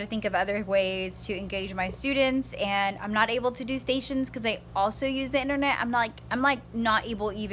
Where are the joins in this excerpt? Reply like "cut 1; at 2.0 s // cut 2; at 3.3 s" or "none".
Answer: none